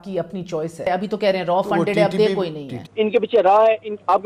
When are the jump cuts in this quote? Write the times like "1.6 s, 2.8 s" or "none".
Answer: 0.9 s, 2.9 s